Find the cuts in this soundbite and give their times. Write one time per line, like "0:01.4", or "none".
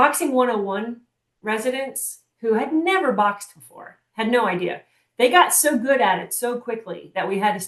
none